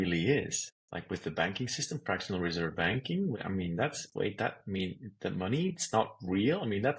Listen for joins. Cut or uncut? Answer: cut